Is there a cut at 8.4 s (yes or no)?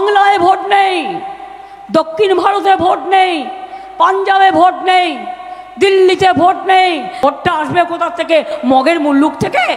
no